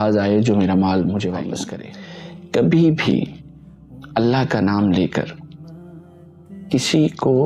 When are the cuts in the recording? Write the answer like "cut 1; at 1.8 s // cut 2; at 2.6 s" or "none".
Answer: cut 1; at 1.7 s